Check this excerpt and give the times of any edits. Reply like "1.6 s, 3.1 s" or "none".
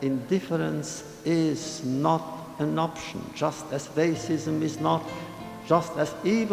none

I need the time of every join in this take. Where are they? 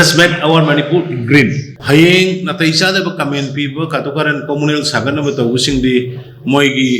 1.7 s

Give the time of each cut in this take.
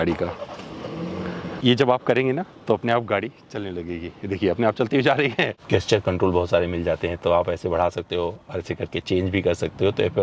1.6 s, 5.6 s

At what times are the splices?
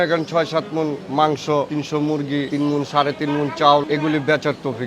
1.0 s, 2.1 s, 3.9 s

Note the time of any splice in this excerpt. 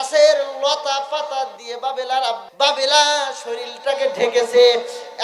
2.4 s

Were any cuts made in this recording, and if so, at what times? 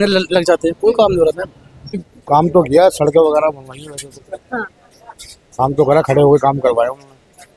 2.1 s

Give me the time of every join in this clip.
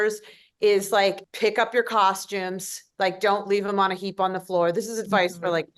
1.3 s

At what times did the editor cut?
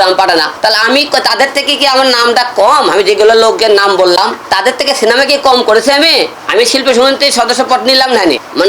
6.3 s

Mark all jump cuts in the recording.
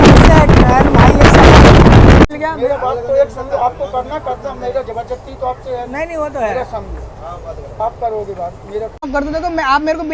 2.3 s, 9.1 s

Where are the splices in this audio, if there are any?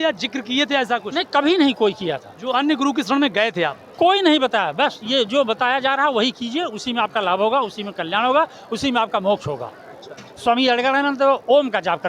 none

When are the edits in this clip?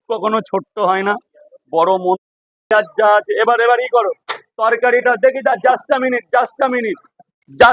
2.2 s

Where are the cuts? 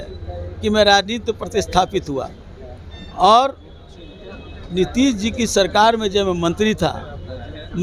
none

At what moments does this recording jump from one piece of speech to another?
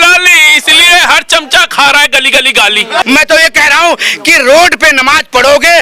3.0 s

